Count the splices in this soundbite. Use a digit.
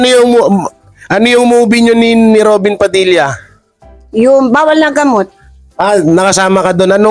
0